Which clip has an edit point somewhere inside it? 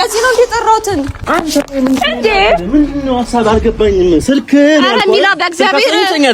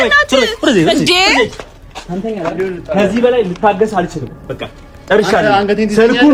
first; 1 cut; at 1.2 s

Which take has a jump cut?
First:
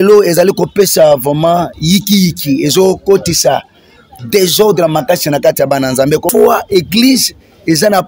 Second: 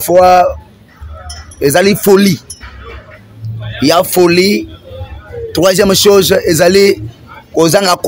first; 1 cut; at 6.3 s

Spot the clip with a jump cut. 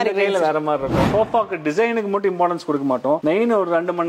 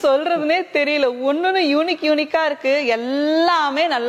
first; 1 cut; at 1.1 s

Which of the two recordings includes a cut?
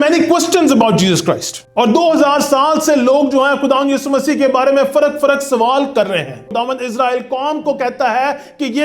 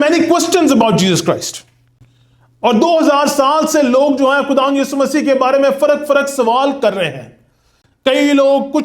first; 2 cuts; at 1.5 s, 6.5 s

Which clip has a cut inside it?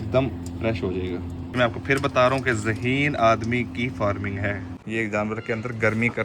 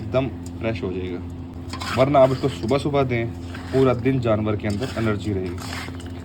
first; 2 cuts; at 1.6 s, 4.7 s

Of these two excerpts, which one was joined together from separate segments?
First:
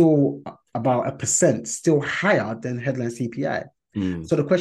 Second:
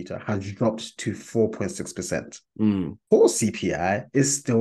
second; 1 cut; at 3.0 s

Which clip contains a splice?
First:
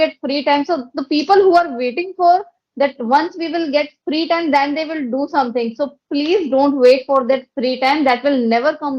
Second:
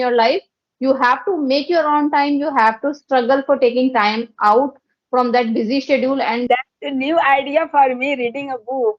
second; 1 cut; at 6.4 s

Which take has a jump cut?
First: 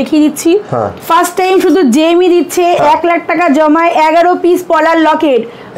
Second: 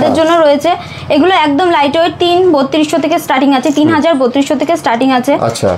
first; 1 cut; at 1.0 s

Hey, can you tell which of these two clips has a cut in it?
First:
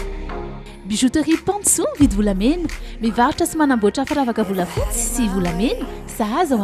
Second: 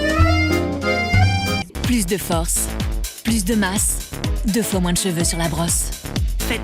second; 1 cut; at 1.7 s

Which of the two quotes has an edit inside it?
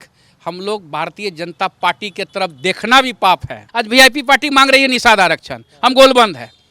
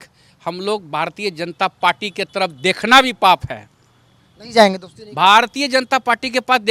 first; 1 cut; at 3.7 s

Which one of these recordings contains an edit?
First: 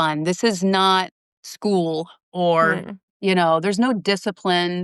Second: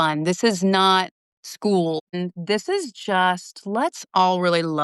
second; 1 cut; at 2.2 s

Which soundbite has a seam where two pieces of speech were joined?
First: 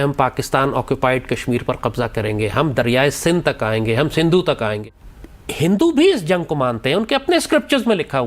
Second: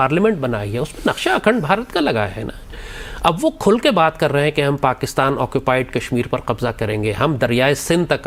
first; 1 cut; at 4.8 s

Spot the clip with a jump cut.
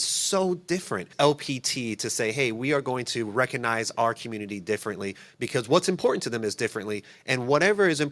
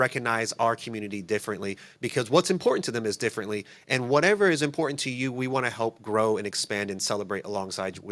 first; 1 cut; at 1.1 s

